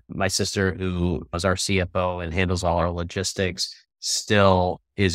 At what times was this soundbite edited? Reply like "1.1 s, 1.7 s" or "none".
1.3 s